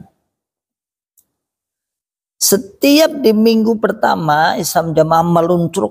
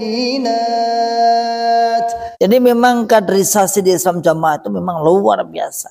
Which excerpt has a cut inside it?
second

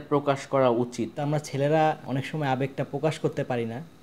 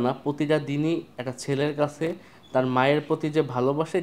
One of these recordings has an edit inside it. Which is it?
first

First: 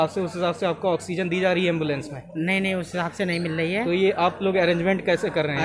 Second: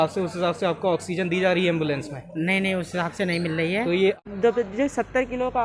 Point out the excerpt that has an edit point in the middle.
second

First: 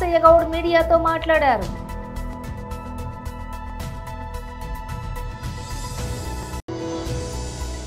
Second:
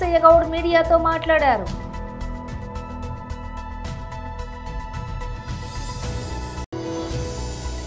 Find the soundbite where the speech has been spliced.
first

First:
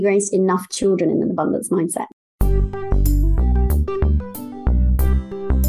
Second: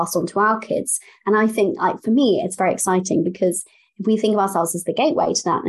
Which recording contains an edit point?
first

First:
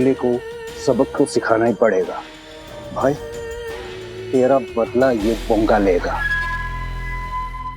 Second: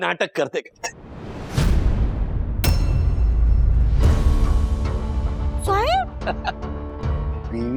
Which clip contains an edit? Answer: first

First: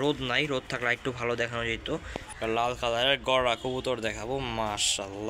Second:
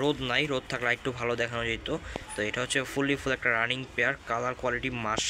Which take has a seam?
first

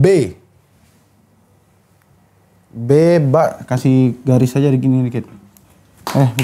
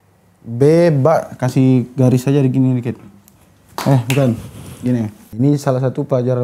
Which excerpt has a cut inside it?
second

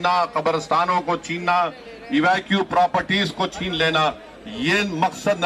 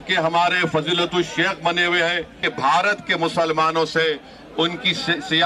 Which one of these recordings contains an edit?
second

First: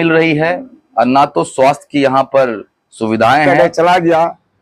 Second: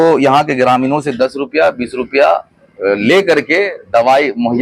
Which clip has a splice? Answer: first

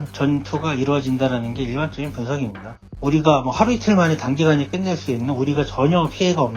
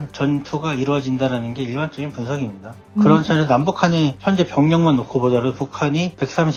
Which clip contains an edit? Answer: first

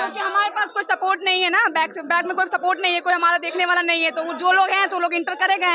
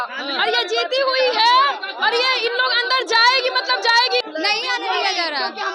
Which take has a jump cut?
second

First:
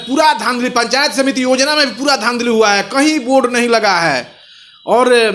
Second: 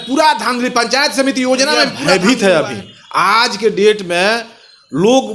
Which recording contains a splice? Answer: second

